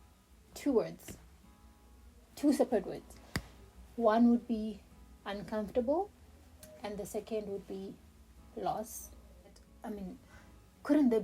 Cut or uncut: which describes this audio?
cut